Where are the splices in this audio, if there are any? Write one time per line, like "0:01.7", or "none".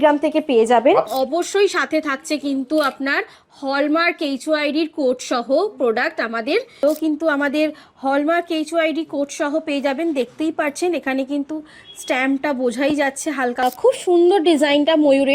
0:01.1
0:06.8
0:13.6